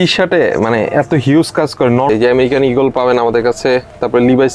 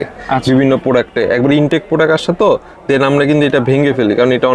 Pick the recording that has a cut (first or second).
first